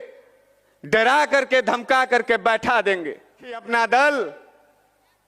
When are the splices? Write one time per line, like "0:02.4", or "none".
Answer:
0:03.6